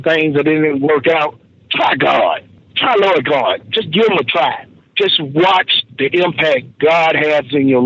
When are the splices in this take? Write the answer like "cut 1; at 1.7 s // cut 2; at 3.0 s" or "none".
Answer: cut 1; at 4.8 s